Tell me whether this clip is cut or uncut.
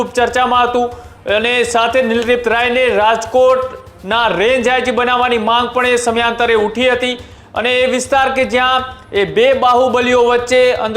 uncut